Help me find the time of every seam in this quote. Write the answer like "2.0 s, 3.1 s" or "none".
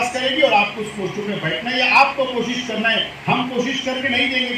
none